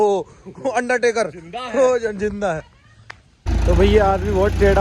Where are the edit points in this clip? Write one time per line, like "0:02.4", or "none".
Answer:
0:03.5